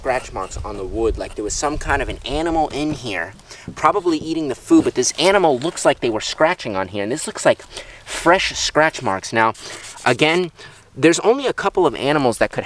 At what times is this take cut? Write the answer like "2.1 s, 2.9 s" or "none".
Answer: none